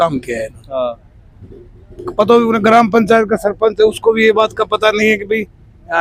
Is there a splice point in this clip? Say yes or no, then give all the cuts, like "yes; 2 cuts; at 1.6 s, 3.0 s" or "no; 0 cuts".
no; 0 cuts